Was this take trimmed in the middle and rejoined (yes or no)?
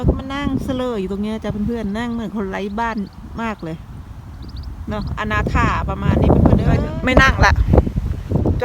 yes